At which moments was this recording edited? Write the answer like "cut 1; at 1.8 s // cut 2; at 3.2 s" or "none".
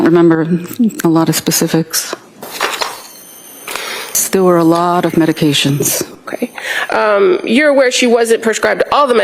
cut 1; at 4.2 s